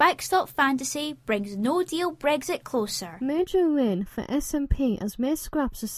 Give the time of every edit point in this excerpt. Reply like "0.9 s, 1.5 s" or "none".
3.0 s